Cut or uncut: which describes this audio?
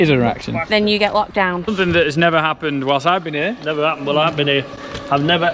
cut